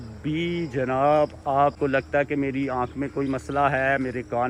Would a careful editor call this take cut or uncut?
cut